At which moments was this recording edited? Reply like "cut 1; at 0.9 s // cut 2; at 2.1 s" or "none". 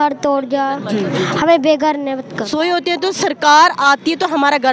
cut 1; at 2.5 s